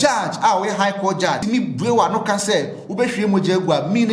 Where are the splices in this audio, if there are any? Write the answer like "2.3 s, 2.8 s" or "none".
1.4 s